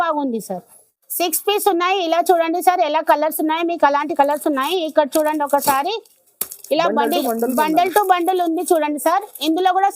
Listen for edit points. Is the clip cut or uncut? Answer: cut